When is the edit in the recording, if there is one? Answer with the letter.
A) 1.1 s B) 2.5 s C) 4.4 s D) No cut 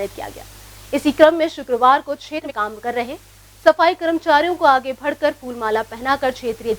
B